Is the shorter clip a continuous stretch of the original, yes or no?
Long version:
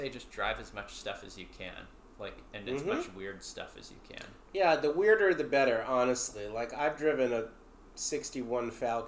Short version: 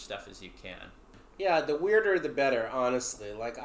no